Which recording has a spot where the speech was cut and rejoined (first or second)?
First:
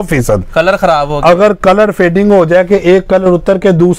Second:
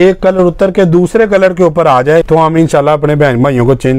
second